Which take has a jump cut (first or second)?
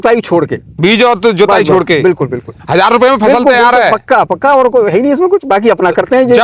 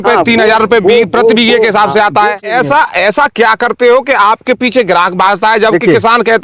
second